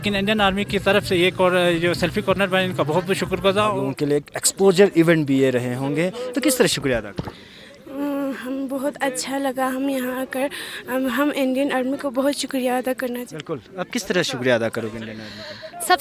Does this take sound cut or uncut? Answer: cut